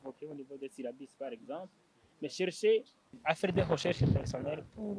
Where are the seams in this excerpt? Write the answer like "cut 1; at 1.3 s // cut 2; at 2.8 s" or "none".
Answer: cut 1; at 3.1 s